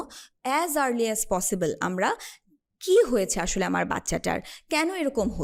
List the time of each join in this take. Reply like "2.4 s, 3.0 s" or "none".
none